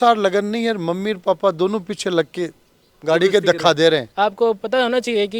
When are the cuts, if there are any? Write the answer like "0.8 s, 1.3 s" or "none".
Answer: 4.1 s